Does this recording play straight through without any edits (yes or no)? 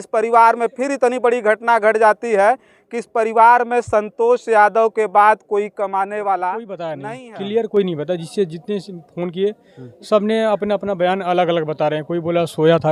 no